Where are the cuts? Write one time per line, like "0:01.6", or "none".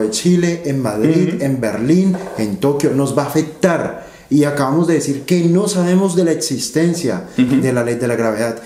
none